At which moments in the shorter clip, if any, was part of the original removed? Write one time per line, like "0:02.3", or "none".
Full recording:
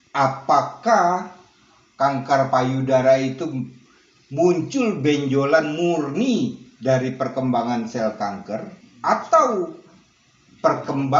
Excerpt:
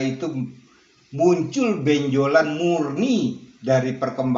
none